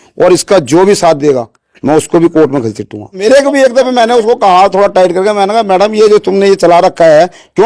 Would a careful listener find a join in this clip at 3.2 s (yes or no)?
yes